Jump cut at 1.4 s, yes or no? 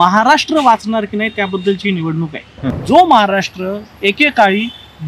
no